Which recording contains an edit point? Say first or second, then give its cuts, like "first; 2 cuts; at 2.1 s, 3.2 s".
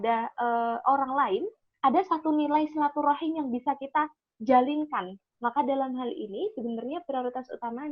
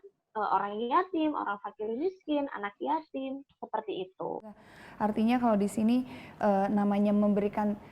second; 1 cut; at 4.7 s